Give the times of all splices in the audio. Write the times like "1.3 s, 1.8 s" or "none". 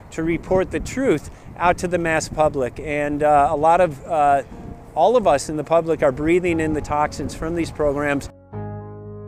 none